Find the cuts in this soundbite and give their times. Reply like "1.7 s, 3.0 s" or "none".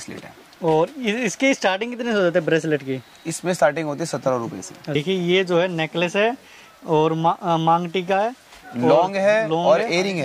4.9 s